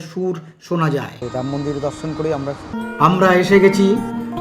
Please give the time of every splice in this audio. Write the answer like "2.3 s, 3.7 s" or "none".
1.2 s, 2.8 s